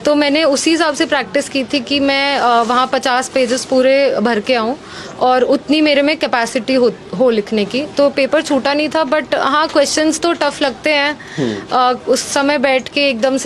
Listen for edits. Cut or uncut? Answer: uncut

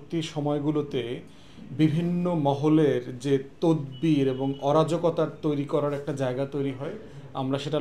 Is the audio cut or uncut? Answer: uncut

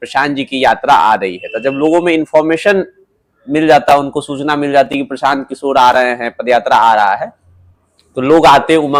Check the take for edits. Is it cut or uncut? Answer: uncut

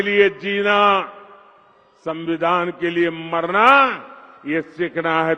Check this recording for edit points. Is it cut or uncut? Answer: uncut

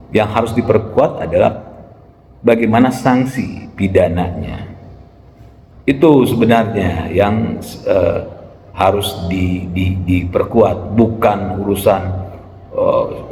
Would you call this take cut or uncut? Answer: uncut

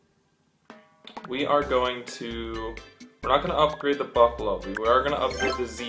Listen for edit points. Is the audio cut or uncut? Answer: uncut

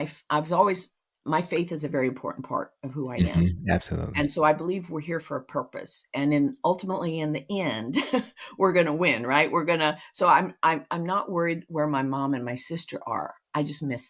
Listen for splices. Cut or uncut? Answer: uncut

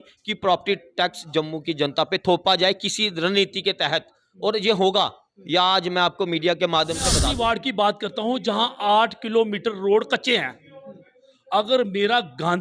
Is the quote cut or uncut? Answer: cut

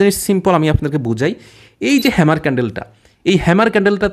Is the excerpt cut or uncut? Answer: uncut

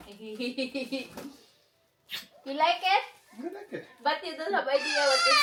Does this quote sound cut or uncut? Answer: uncut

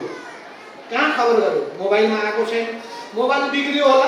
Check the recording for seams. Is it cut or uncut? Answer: uncut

